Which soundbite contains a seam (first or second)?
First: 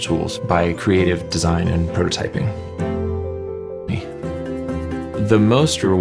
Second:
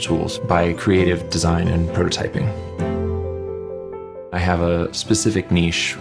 second